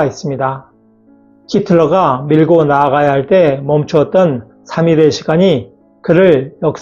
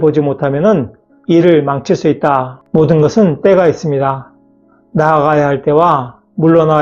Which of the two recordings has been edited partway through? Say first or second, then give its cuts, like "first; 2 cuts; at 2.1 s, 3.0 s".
second; 1 cut; at 2.6 s